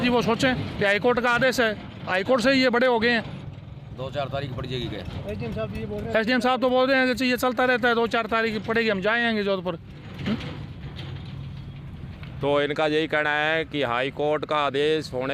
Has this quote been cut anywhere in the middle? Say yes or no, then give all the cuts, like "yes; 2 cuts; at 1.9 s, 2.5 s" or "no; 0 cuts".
no; 0 cuts